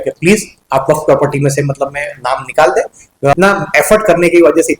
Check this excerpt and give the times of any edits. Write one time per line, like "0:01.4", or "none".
0:03.3